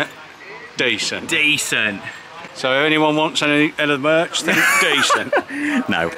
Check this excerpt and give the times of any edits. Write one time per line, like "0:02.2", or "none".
none